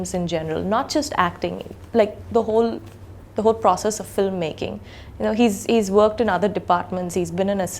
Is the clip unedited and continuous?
yes; 0 cuts

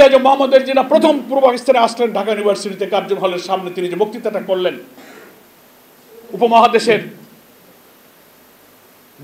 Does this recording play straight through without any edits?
no; 1 cut; at 5.0 s

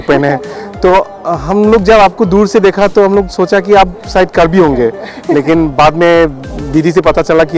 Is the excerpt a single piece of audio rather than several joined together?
yes; 0 cuts

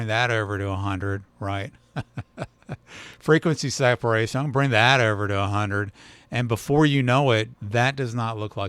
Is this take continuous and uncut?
no; 1 cut; at 7.6 s

